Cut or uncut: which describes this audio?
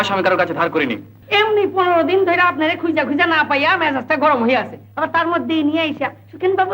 cut